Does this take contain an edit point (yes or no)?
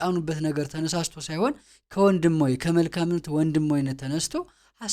no